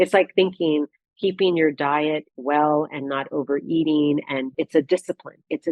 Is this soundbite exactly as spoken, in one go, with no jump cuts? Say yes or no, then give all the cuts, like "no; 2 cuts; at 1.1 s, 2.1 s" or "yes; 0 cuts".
no; 1 cut; at 4.5 s